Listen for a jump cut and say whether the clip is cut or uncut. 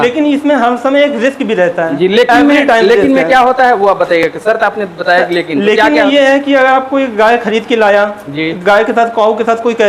uncut